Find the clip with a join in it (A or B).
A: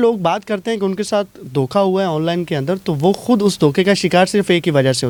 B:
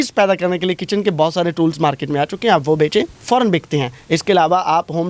B